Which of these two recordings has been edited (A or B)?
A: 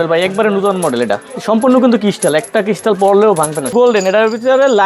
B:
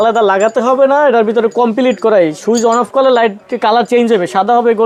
A